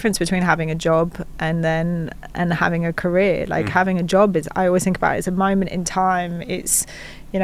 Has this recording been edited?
no; 0 cuts

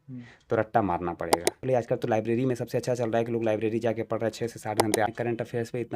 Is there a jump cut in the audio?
yes; 2 cuts; at 1.6 s, 5.1 s

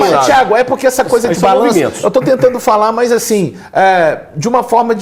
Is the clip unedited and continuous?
yes; 0 cuts

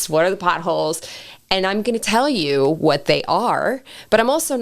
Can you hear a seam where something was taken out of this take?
no; 0 cuts

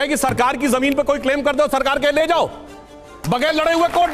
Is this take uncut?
yes; 0 cuts

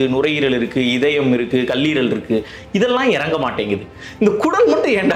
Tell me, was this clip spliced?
no; 0 cuts

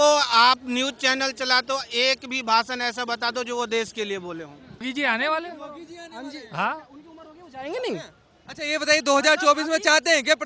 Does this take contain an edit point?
yes; 1 cut; at 4.8 s

